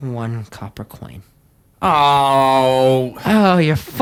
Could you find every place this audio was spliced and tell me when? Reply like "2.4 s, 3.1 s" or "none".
none